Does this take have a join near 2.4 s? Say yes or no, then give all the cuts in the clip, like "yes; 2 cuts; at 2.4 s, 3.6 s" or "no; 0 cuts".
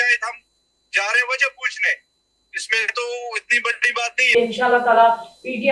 no; 1 cut; at 4.2 s